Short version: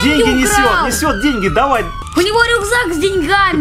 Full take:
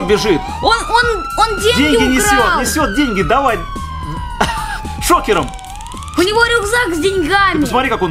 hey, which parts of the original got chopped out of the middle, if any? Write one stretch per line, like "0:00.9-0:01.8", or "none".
0:03.7-0:06.0